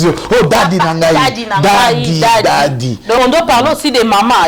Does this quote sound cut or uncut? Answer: cut